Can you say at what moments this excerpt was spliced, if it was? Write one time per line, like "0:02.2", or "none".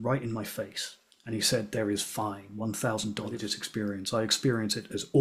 0:03.6

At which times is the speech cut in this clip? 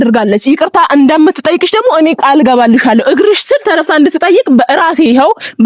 none

